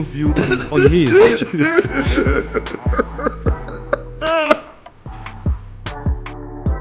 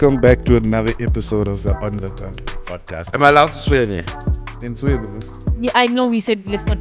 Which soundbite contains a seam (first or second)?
first